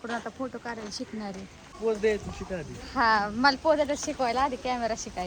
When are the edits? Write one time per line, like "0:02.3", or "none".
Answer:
0:01.7